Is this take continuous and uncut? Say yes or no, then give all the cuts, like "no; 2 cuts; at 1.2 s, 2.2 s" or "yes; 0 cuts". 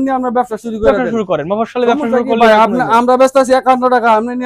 yes; 0 cuts